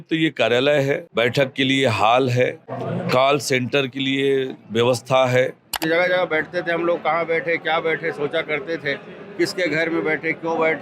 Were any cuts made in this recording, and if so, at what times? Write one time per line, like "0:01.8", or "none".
0:01.1
0:02.7
0:05.8